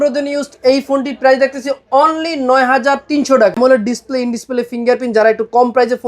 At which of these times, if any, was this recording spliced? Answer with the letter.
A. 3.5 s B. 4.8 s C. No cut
A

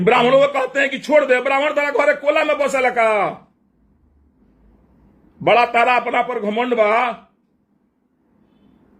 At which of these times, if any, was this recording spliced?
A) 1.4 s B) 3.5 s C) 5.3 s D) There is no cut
D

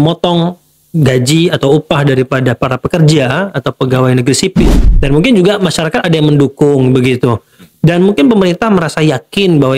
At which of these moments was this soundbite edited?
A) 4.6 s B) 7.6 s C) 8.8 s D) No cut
A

